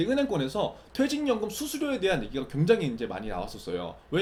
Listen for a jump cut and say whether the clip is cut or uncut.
uncut